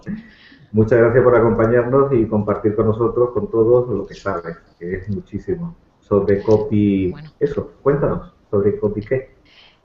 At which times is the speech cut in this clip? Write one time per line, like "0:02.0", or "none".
0:02.7